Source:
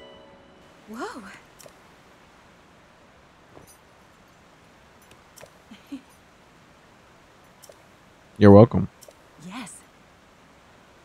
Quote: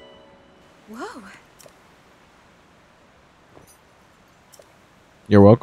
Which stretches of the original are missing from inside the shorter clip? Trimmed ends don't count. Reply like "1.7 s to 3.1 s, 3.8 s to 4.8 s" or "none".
4.4 s to 7.5 s